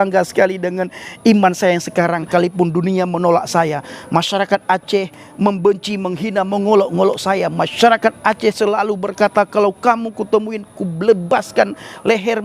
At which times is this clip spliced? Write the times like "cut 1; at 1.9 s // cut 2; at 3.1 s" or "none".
cut 1; at 2.3 s